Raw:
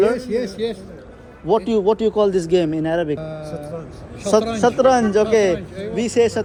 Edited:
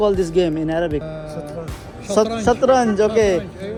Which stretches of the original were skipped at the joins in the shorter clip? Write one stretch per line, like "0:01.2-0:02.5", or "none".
none